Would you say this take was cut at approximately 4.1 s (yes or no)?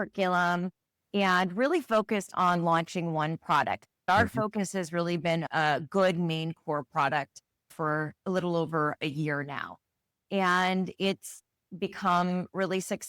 yes